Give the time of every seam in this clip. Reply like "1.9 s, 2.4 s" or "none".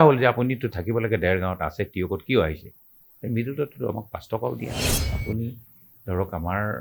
4.7 s